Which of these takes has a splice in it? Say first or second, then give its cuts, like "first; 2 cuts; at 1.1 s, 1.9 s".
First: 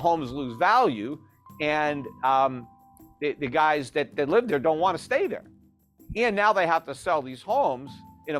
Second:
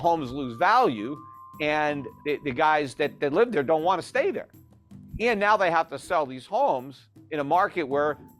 second; 1 cut; at 2.1 s